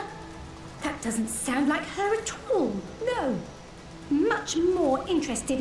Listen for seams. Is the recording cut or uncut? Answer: uncut